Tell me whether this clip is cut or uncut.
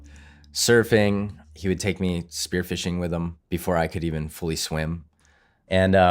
cut